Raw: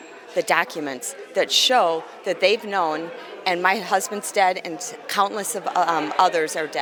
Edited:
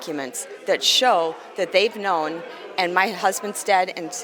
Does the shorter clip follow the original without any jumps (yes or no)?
yes